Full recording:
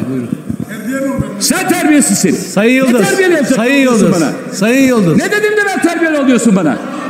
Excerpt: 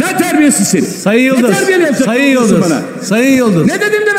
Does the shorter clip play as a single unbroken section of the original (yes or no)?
yes